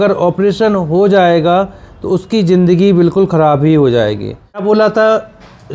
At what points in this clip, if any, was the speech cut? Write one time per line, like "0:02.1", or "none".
0:04.6